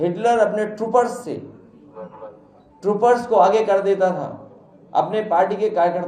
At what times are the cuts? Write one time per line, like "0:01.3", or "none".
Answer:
none